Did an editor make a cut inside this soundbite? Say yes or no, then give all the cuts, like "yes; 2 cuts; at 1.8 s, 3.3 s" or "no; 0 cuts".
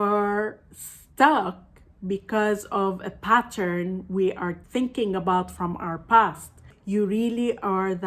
yes; 2 cuts; at 4.6 s, 6.7 s